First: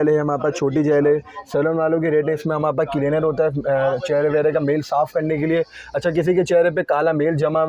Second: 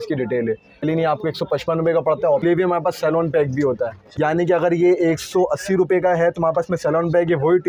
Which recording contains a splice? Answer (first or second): second